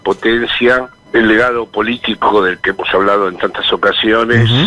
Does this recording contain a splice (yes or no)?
yes